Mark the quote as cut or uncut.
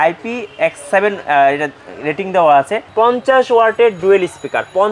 cut